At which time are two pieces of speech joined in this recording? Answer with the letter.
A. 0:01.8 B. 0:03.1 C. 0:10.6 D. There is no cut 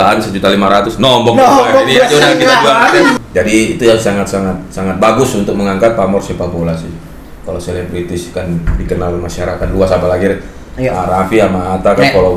B